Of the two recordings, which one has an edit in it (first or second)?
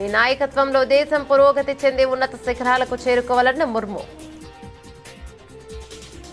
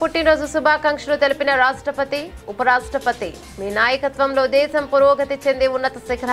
first